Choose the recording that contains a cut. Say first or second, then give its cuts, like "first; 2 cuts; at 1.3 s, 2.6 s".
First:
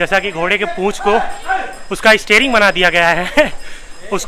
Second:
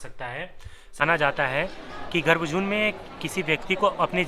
second; 1 cut; at 1.0 s